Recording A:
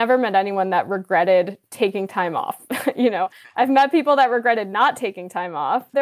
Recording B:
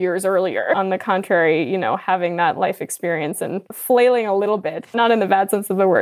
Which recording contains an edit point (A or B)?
B